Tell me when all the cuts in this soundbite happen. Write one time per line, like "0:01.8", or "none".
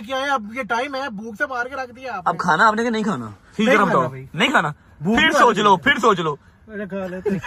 none